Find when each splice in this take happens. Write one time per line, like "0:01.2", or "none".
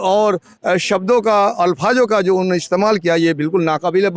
none